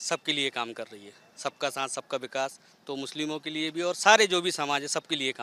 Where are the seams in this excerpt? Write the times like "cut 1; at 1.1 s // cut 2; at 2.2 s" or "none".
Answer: none